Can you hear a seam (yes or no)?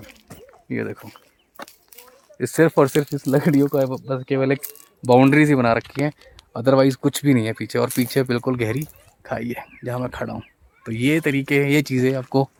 no